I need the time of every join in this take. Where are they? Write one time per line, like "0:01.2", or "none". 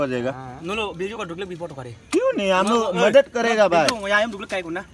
none

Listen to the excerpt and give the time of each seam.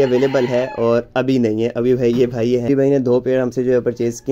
0:02.7

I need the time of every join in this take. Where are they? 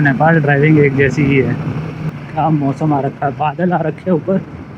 0:02.0

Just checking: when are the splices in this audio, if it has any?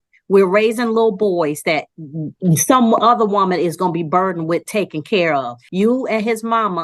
0:05.6

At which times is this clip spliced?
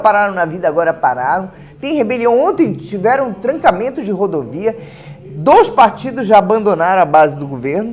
none

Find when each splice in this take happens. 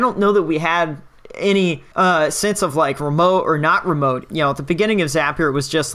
0:01.8
0:04.2

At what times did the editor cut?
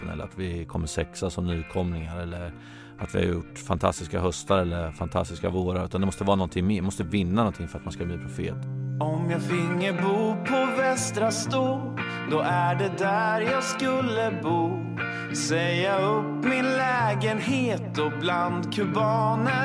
0:08.5

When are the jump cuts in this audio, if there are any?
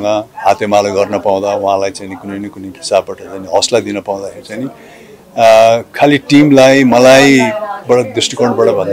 none

